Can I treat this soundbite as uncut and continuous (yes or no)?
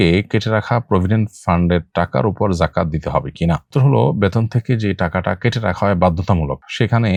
yes